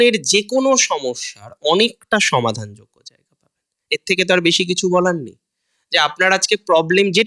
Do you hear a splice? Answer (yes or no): no